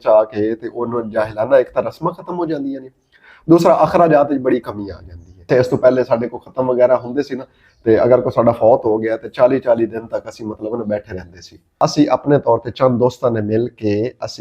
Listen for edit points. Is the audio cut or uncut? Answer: cut